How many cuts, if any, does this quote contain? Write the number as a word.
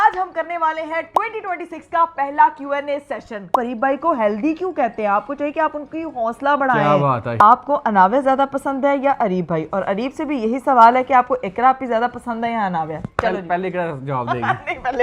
two